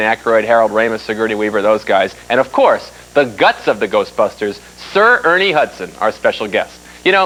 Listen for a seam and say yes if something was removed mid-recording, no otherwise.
no